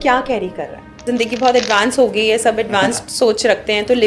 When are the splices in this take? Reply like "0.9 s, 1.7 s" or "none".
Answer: 1.0 s

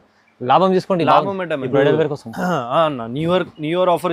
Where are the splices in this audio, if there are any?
1.6 s

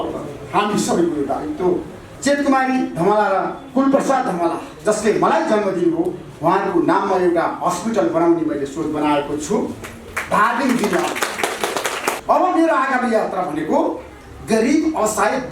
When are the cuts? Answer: 2.0 s, 12.2 s

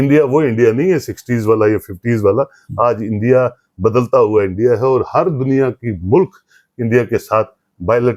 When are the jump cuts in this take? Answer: none

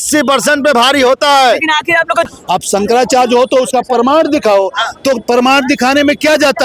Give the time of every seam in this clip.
2.3 s

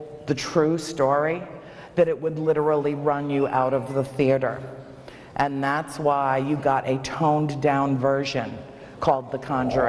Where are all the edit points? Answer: none

